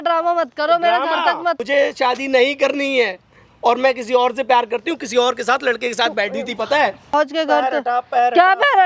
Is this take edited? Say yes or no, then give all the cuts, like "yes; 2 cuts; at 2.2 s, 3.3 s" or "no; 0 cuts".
yes; 2 cuts; at 1.6 s, 7.1 s